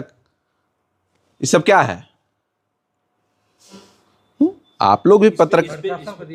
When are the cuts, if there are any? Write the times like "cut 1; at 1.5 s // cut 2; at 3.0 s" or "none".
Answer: none